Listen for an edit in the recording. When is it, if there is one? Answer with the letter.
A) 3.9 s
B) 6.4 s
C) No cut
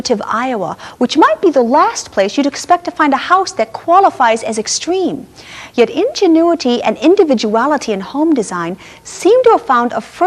B